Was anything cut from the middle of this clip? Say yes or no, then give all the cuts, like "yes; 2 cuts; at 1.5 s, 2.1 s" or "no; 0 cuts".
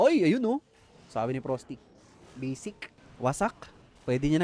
yes; 1 cut; at 2.9 s